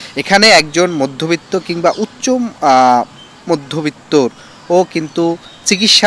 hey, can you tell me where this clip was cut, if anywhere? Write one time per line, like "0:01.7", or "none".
none